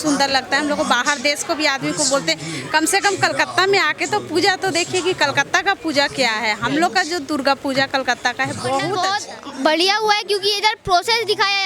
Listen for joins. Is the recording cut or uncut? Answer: cut